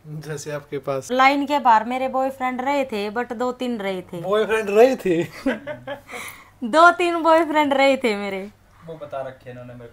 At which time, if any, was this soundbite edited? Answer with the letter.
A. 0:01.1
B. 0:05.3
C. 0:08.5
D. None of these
A